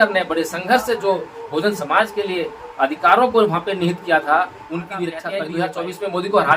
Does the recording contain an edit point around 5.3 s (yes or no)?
yes